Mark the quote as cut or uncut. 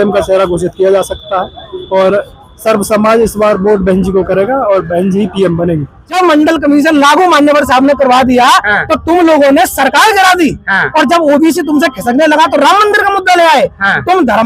cut